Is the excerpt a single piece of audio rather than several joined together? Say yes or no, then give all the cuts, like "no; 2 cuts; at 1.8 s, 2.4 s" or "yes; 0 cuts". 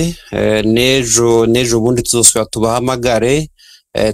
yes; 0 cuts